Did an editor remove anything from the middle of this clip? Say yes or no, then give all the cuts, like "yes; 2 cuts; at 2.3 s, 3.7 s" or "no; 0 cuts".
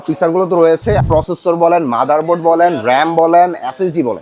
yes; 1 cut; at 1.0 s